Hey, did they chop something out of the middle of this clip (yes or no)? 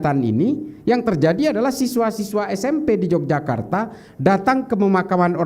no